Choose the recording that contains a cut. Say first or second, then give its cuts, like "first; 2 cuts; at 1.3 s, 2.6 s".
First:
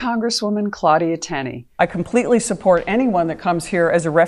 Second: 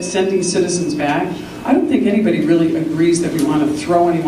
first; 1 cut; at 1.6 s